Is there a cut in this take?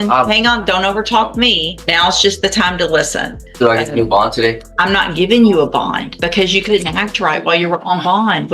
yes; 4 cuts; at 1.7 s, 3.4 s, 4.7 s, 6.1 s

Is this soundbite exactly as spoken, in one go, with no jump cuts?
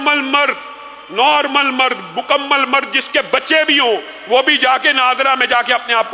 yes; 0 cuts

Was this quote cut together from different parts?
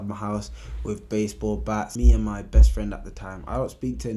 yes; 1 cut; at 2.0 s

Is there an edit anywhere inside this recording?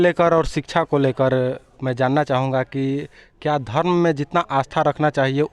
no; 0 cuts

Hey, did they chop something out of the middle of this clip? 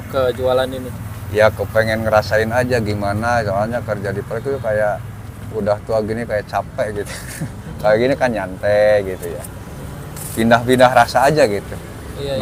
no; 0 cuts

